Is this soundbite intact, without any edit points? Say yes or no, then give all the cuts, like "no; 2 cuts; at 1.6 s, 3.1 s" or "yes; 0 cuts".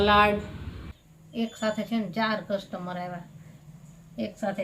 no; 1 cut; at 0.9 s